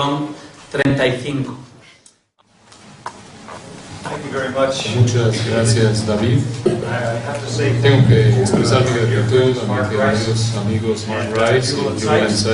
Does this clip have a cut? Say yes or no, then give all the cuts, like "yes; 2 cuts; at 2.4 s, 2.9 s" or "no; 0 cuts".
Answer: yes; 1 cut; at 10.6 s